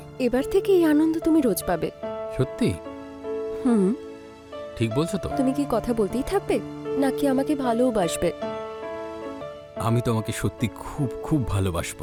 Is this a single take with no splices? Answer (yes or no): yes